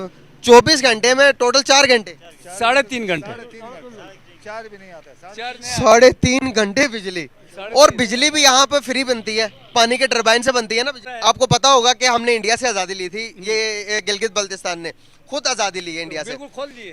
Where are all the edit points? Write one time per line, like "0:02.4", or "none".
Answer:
0:11.0

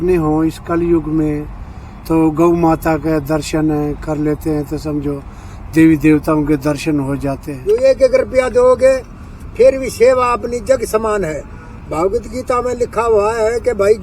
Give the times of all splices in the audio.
0:07.5

